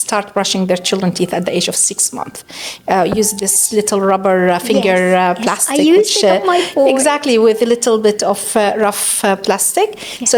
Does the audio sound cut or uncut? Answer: uncut